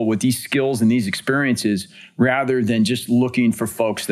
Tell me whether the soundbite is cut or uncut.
uncut